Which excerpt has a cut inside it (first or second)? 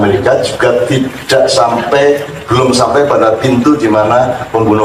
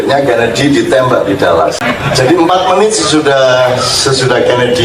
second